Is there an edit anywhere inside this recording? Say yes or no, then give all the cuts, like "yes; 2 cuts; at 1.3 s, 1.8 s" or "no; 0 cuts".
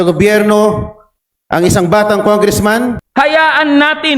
yes; 1 cut; at 3.0 s